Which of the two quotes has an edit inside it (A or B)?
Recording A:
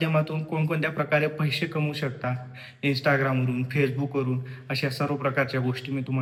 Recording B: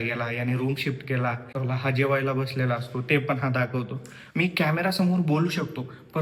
B